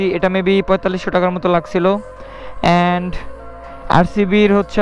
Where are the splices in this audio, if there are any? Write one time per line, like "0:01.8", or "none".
none

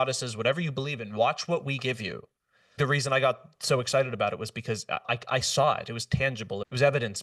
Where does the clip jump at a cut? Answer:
0:02.8

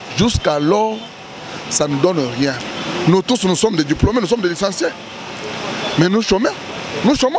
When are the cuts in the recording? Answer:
0:02.6

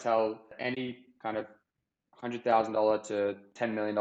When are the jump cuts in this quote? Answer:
none

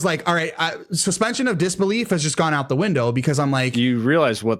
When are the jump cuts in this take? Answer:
0:03.5

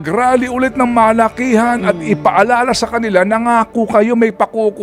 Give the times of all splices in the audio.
none

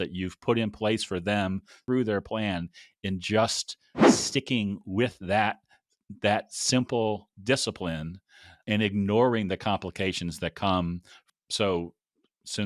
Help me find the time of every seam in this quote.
0:01.7
0:11.2

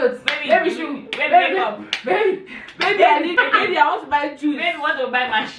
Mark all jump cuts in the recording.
0:03.4

